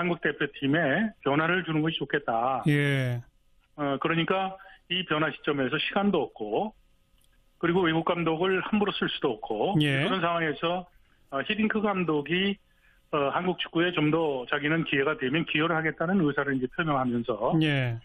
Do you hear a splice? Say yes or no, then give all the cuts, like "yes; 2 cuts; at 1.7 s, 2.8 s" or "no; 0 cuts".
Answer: no; 0 cuts